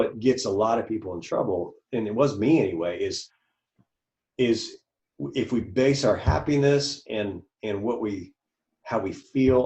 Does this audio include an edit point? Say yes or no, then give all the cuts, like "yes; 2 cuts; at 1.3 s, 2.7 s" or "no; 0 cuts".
no; 0 cuts